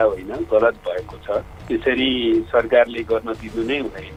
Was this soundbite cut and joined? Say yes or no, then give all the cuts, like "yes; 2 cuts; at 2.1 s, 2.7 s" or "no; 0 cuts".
no; 0 cuts